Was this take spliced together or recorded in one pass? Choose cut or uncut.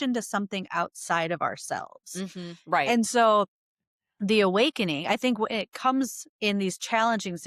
uncut